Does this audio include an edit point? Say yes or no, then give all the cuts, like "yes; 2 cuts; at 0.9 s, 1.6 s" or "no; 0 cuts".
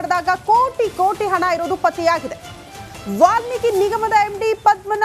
no; 0 cuts